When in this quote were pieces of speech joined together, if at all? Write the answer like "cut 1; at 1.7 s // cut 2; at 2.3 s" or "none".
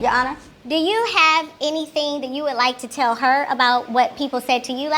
none